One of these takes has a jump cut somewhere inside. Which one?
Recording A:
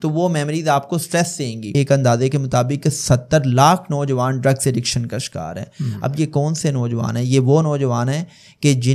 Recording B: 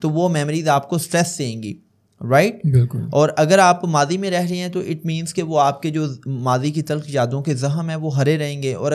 A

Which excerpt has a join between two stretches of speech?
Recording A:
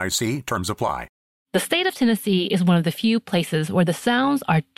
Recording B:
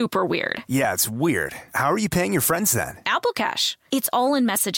A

